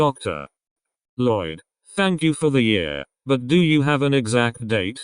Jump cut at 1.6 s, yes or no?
yes